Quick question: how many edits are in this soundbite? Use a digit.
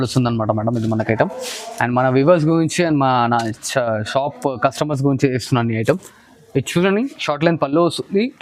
0